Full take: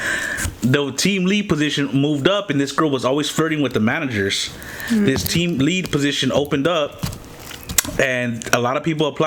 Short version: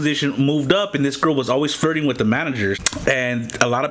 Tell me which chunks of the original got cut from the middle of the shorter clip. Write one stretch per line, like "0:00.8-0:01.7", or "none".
0:04.4-0:07.8